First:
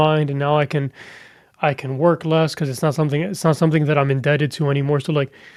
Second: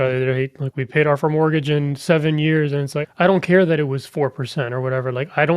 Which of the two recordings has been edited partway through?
second; 1 cut; at 2.9 s

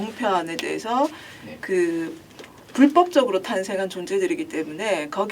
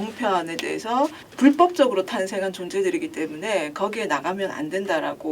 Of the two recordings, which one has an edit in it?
second; 1 cut; at 1.2 s

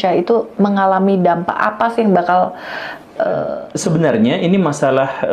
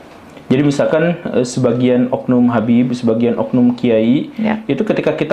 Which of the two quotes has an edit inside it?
first; 1 cut; at 3.5 s

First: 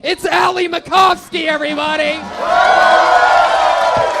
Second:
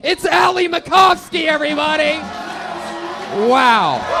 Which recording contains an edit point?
first; 1 cut; at 2.4 s

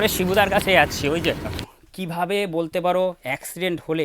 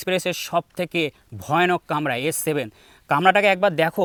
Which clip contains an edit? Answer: first; 1 cut; at 1.6 s

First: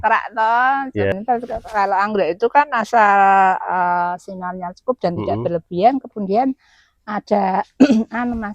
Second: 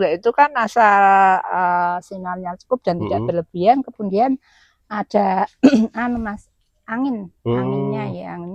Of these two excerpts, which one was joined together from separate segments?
first; 1 cut; at 1.1 s

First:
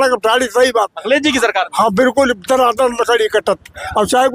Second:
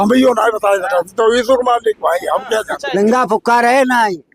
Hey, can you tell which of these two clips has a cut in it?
second; 1 cut; at 2.8 s

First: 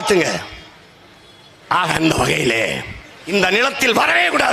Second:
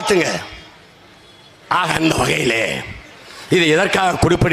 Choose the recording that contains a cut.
first; 1 cut; at 3.2 s

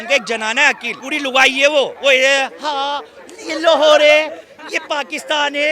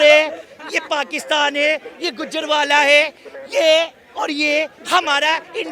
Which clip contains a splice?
first; 2 cuts; at 0.9 s, 1.9 s

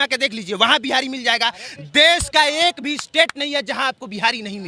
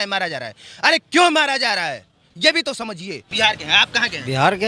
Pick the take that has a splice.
second; 1 cut; at 3.2 s

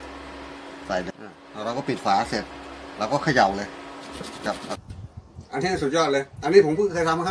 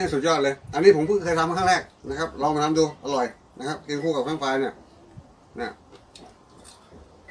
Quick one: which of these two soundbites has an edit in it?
first; 2 cuts; at 1.1 s, 4.7 s

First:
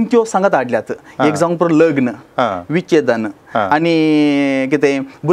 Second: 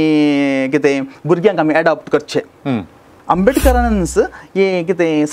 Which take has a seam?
second; 1 cut; at 3.1 s

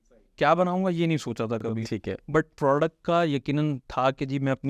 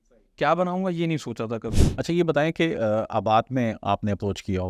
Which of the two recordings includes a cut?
second; 1 cut; at 1.8 s

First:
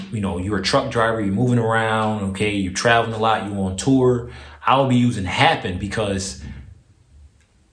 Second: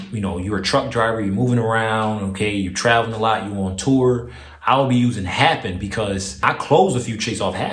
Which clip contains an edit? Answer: second; 1 cut; at 6.4 s

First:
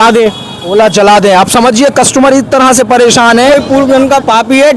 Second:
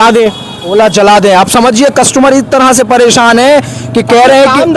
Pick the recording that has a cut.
first; 1 cut; at 3.5 s

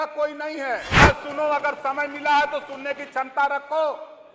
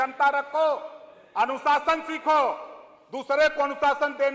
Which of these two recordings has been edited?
first; 1 cut; at 1.0 s

